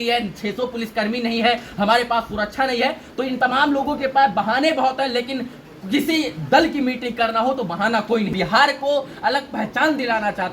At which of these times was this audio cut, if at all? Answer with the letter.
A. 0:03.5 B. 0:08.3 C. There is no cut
B